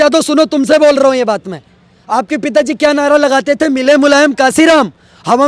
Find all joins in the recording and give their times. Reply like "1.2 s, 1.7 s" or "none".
none